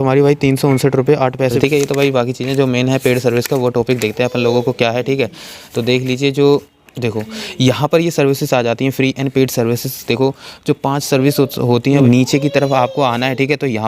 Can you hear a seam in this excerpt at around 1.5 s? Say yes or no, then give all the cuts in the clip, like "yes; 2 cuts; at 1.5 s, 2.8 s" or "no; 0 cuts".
yes; 2 cuts; at 1.5 s, 12.0 s